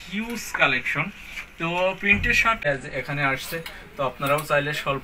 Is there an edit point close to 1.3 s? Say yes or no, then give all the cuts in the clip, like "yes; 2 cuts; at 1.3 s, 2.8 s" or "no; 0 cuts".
no; 1 cut; at 2.6 s